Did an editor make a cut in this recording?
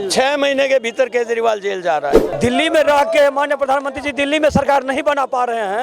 yes; 1 cut; at 2.3 s

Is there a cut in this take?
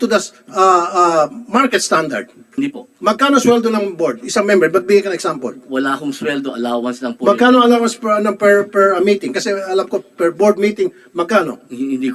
yes; 1 cut; at 2.4 s

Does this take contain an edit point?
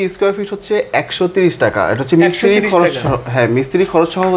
no; 0 cuts

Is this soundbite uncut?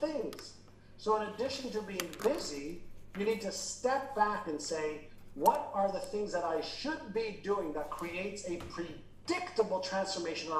yes; 0 cuts

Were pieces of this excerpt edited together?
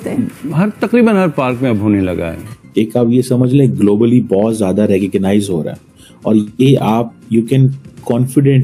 yes; 1 cut; at 2.4 s

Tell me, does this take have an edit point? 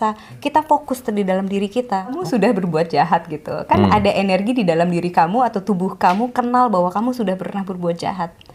yes; 1 cut; at 2.2 s

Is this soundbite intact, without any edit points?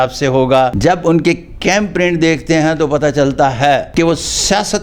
no; 2 cuts; at 0.8 s, 3.9 s

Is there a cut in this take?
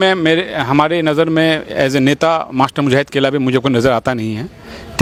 no; 0 cuts

